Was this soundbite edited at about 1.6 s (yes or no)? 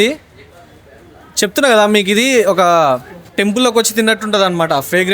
no